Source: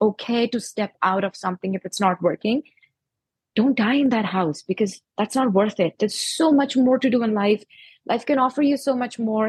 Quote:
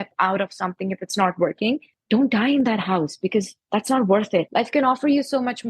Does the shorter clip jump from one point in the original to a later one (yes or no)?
yes